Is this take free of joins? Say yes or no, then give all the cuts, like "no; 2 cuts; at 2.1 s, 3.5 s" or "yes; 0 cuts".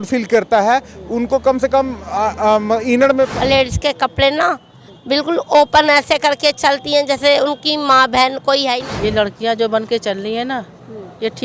no; 2 cuts; at 3.4 s, 8.8 s